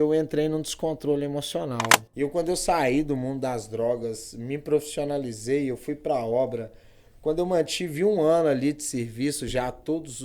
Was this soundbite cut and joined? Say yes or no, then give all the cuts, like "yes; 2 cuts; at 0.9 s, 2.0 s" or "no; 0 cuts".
yes; 1 cut; at 2.0 s